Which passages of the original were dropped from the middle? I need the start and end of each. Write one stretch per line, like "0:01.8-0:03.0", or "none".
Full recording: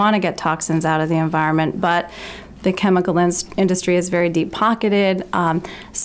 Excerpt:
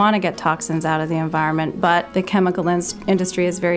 0:02.1-0:02.6